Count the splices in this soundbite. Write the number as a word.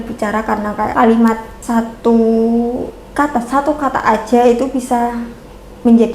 two